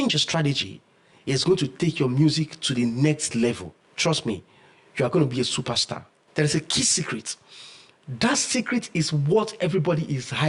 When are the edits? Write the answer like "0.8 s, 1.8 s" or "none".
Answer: 6.2 s